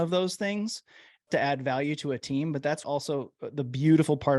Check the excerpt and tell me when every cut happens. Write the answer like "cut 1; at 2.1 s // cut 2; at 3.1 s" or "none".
cut 1; at 1.2 s // cut 2; at 2.8 s